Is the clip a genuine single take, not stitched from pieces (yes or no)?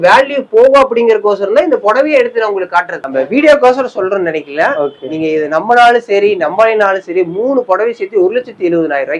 no